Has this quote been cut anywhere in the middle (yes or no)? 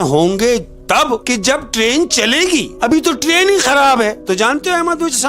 yes